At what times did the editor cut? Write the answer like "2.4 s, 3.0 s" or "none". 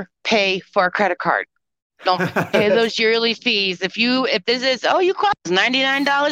none